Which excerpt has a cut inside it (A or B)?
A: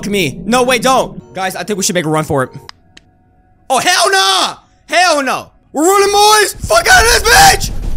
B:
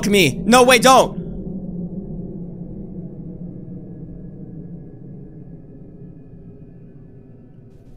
A